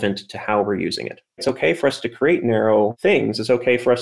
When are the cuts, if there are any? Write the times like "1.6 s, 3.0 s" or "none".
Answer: 1.4 s, 3.0 s